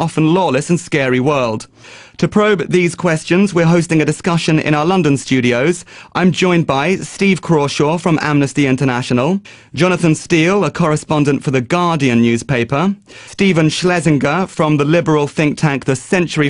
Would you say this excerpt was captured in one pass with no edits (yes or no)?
no